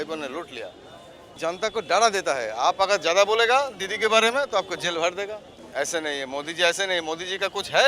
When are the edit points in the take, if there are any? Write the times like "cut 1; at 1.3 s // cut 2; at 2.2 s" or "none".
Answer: cut 1; at 1.3 s // cut 2; at 5.5 s